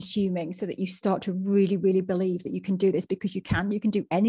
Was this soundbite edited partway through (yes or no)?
no